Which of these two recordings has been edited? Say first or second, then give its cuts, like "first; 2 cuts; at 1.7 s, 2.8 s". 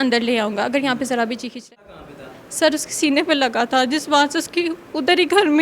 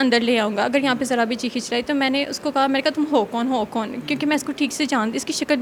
first; 1 cut; at 1.7 s